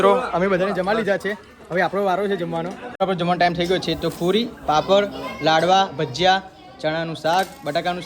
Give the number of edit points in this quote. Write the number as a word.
one